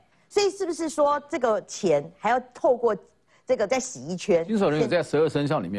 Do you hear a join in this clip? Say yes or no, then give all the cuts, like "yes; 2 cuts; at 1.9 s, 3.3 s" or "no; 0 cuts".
no; 0 cuts